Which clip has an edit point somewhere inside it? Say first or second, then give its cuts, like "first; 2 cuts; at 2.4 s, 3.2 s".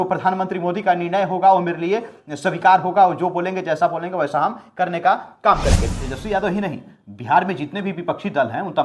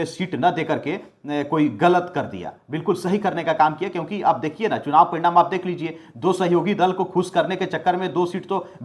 first; 1 cut; at 5.8 s